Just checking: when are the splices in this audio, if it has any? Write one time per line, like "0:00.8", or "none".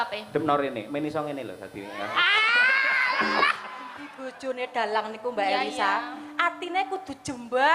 0:04.2